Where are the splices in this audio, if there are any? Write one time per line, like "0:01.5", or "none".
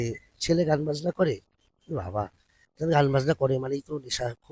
none